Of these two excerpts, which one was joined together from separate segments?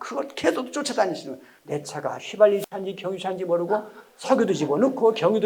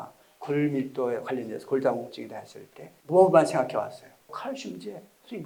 first; 1 cut; at 1.5 s

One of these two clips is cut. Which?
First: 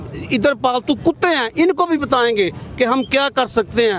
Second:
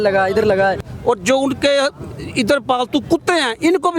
second; 1 cut; at 0.9 s

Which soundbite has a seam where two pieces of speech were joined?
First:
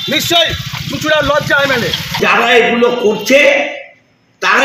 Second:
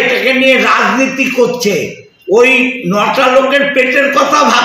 first; 1 cut; at 2.2 s

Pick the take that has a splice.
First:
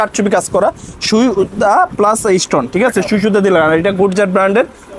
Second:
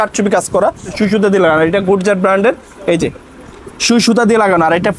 second; 1 cut; at 0.9 s

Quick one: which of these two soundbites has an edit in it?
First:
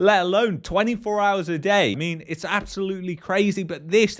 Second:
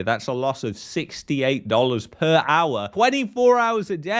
first; 1 cut; at 2.0 s

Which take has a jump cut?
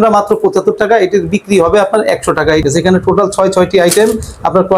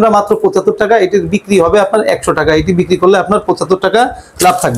first; 1 cut; at 2.6 s

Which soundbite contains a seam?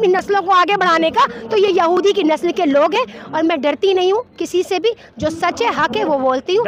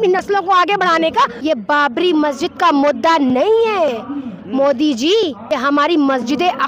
second; 2 cuts; at 1.4 s, 5.4 s

